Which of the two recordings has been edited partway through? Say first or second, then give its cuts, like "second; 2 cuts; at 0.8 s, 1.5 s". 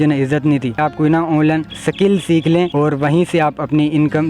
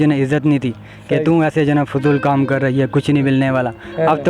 first; 3 cuts; at 0.8 s, 1.8 s, 2.7 s